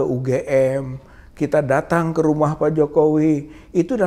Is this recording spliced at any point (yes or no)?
no